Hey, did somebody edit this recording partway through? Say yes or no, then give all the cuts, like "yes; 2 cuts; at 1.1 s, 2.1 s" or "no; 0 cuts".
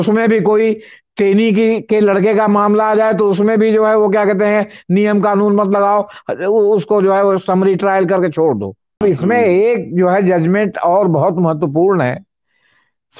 yes; 1 cut; at 9.0 s